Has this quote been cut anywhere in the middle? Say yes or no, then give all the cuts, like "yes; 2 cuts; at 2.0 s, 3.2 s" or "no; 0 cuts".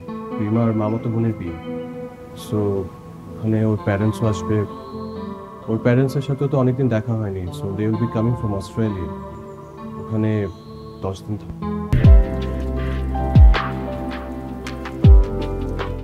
yes; 1 cut; at 11.9 s